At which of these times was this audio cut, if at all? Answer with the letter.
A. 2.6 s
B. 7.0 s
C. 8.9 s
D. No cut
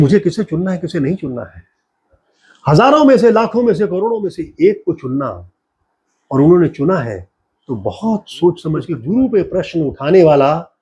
C